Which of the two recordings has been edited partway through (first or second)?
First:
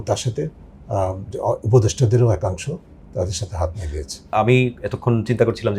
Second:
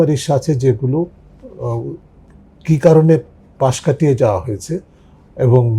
first